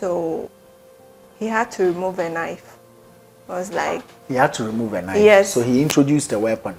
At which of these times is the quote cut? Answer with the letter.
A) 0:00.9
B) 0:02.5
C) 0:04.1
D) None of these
D